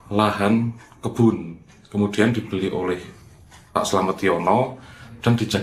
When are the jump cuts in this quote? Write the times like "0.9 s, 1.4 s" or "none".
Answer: none